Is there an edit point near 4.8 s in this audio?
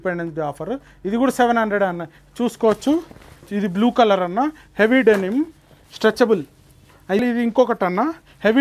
no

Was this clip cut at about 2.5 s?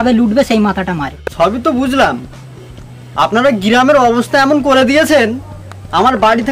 no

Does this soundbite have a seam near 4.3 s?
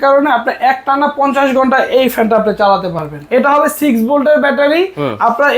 no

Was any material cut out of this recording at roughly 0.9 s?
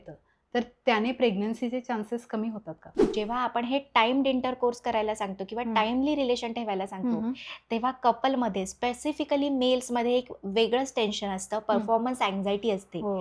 no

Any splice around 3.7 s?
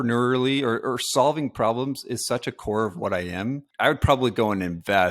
yes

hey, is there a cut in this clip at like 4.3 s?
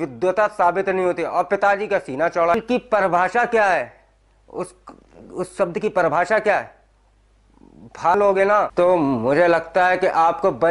no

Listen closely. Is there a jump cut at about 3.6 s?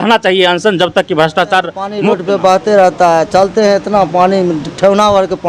no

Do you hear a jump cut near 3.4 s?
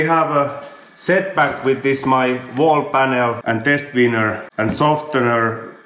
yes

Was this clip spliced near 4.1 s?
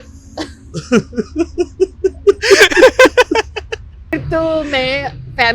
yes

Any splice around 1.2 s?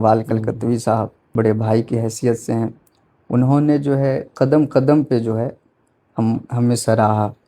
yes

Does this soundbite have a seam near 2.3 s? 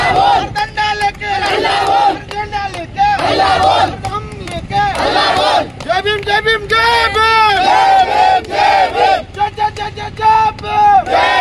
no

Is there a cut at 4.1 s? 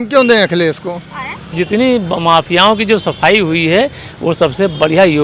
no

